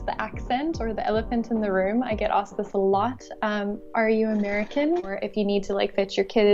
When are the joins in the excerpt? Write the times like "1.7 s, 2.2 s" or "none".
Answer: 5.2 s